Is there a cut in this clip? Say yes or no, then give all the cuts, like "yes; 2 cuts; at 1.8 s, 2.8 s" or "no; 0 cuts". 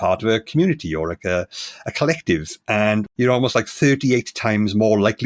yes; 1 cut; at 3.1 s